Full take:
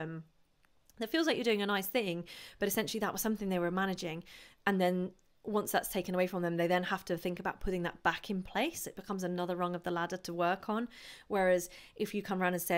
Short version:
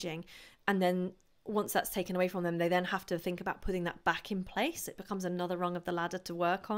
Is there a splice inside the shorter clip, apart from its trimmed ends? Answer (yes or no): no